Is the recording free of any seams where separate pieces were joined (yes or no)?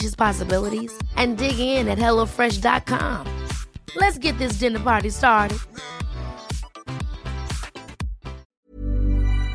no